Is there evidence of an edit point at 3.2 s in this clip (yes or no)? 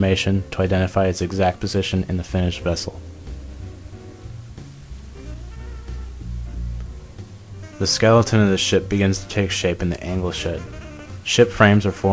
no